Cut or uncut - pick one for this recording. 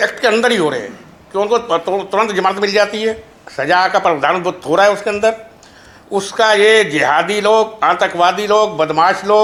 uncut